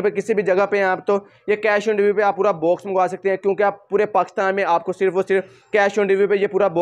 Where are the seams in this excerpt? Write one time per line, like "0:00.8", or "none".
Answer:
none